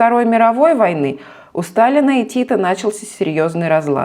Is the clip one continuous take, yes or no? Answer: yes